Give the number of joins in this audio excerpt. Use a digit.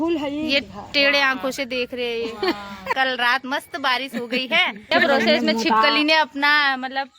2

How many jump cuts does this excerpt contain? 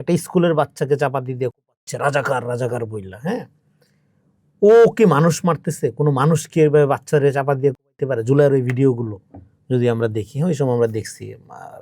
0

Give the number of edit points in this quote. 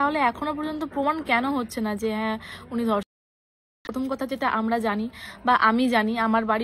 0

